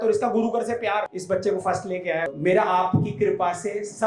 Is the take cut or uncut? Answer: cut